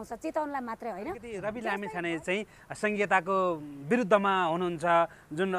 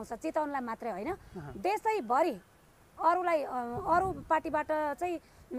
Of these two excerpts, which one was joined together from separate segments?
first; 1 cut; at 1.3 s

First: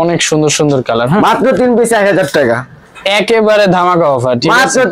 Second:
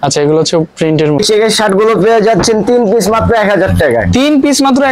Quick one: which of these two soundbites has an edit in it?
second; 1 cut; at 1.2 s

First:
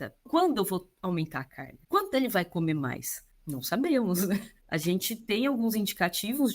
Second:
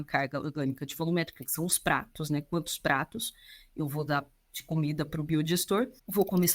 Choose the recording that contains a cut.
first; 1 cut; at 3.2 s

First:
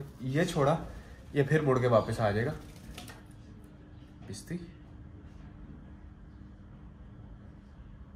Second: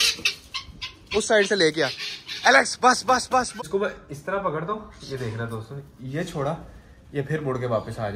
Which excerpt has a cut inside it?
second; 1 cut; at 3.5 s

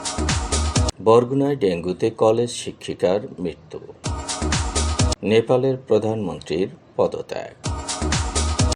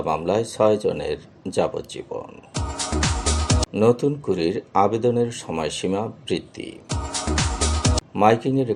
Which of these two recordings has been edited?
first; 1 cut; at 0.9 s

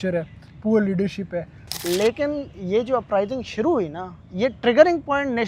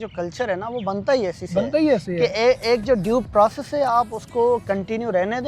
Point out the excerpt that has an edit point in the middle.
first; 1 cut; at 1.6 s

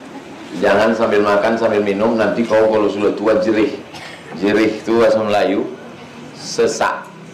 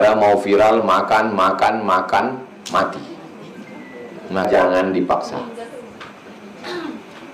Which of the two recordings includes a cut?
second; 1 cut; at 4.5 s

